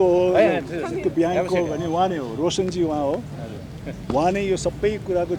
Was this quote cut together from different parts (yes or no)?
no